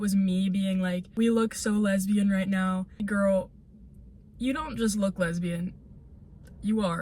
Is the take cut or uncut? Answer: cut